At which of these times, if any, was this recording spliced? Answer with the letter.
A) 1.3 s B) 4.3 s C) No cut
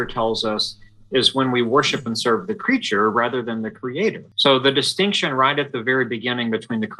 B